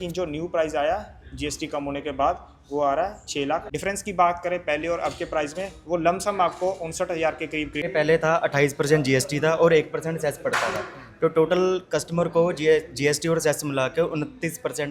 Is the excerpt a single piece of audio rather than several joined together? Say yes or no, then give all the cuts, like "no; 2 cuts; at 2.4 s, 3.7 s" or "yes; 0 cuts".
no; 2 cuts; at 3.7 s, 7.9 s